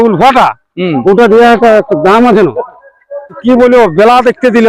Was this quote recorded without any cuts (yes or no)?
no